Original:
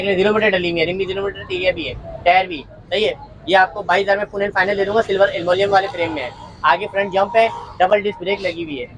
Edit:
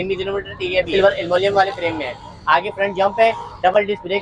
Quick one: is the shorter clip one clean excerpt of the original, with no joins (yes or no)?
no